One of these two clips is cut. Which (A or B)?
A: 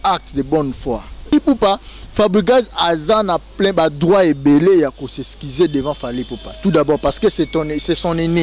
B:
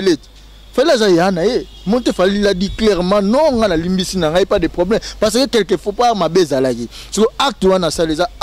A